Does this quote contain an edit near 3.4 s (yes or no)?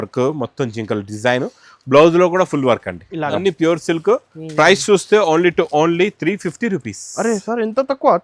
yes